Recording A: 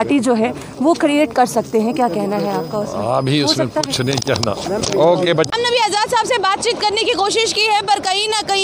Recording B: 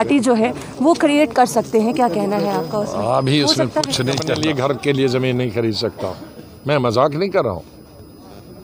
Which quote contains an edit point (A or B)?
B